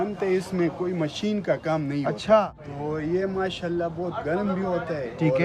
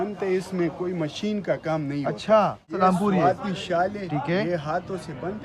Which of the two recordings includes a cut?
first; 1 cut; at 2.6 s

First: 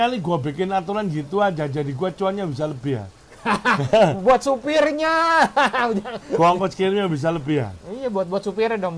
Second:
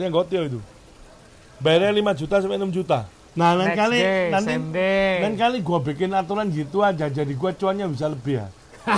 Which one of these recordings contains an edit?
second; 1 cut; at 3.2 s

